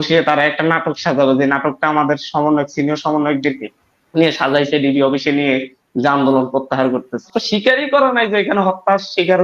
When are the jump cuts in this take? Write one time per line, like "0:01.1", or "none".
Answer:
0:07.3